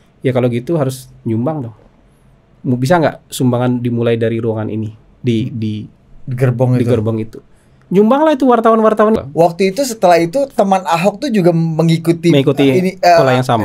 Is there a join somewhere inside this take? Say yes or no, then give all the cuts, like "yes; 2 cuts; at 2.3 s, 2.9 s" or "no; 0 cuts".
yes; 1 cut; at 9.2 s